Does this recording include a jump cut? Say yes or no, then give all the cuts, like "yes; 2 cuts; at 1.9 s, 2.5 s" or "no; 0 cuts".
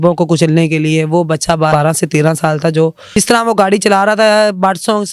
yes; 2 cuts; at 1.7 s, 3.2 s